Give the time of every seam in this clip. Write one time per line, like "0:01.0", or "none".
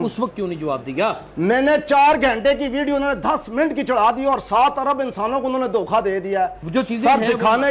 0:06.6